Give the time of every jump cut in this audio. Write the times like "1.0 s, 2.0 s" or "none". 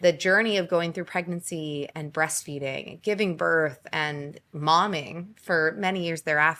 none